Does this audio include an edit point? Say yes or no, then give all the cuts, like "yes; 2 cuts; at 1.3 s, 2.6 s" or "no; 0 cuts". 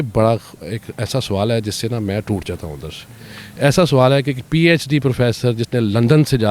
no; 0 cuts